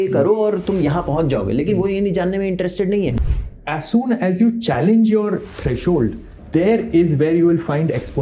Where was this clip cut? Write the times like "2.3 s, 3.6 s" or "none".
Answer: 3.3 s, 6.3 s